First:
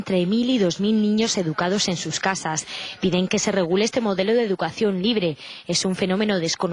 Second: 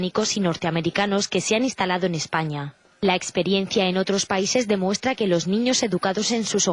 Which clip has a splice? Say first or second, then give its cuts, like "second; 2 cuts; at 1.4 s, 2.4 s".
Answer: first; 1 cut; at 2.6 s